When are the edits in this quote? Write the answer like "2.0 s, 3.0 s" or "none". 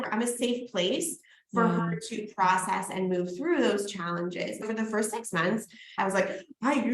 4.6 s, 6.0 s